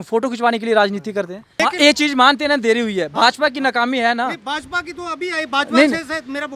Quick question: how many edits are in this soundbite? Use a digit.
1